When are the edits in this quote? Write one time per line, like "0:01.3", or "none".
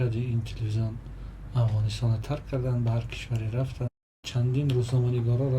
0:04.2